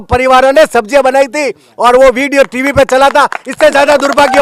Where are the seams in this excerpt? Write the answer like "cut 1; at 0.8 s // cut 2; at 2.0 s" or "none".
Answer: none